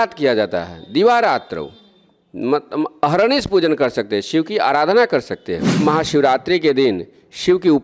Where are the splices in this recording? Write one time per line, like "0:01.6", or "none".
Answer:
0:05.8